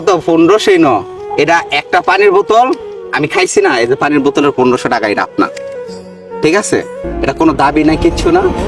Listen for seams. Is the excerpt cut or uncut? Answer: cut